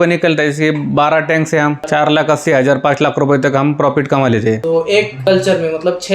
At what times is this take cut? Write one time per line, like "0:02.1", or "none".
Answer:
0:01.8
0:04.8